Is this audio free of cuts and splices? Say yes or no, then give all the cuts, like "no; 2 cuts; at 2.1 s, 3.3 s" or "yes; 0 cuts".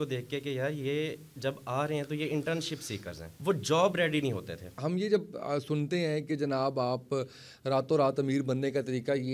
no; 1 cut; at 4.8 s